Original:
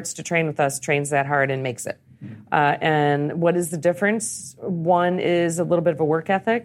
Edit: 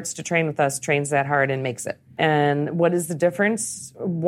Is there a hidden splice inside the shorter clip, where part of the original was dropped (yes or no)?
yes